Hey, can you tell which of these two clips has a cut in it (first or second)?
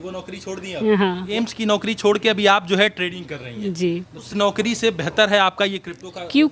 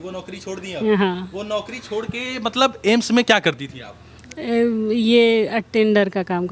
first